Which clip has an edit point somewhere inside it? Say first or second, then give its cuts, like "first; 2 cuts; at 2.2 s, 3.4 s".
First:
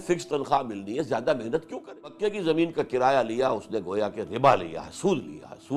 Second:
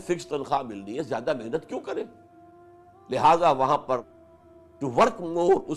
first; 1 cut; at 2.2 s